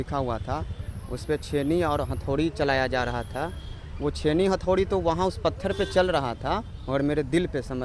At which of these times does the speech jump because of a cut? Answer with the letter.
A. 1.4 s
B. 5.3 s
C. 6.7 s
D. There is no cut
C